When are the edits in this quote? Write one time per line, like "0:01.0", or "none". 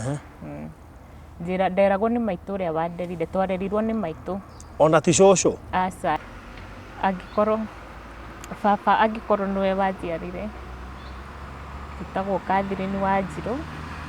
0:06.2